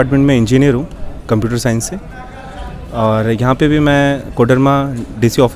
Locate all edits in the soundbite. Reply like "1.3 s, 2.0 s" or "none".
none

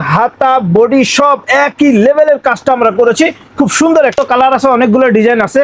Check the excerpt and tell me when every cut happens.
4.2 s

